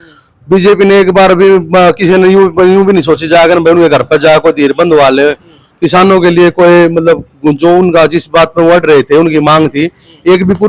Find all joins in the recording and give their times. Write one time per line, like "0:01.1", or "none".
none